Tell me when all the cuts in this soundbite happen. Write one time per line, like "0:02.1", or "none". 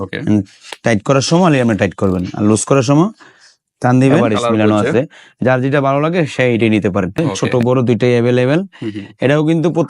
0:04.2
0:07.3